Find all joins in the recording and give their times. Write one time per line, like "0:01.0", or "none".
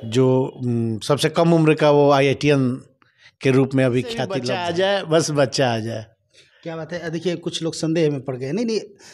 0:04.4